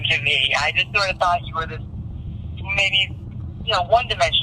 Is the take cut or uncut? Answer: uncut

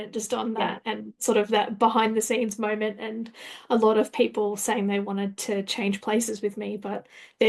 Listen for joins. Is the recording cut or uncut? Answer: uncut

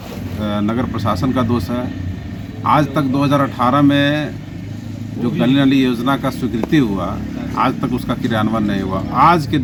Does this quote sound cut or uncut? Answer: uncut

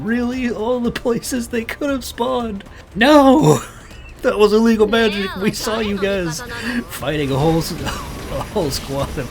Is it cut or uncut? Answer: cut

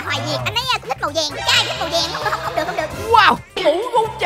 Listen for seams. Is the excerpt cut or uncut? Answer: cut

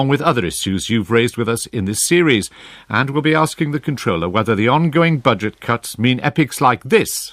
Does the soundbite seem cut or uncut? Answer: uncut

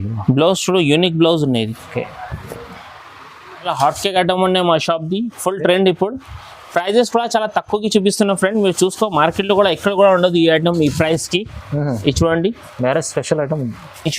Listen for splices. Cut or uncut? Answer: cut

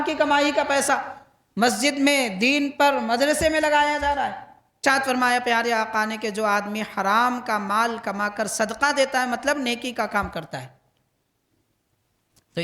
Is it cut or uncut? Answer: cut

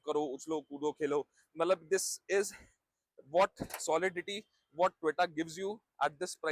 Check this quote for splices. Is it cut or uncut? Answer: uncut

